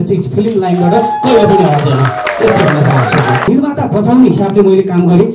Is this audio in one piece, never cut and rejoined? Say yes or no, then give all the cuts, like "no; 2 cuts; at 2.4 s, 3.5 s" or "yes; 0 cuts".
no; 1 cut; at 3.5 s